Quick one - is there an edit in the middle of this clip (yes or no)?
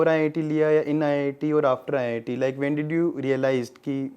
no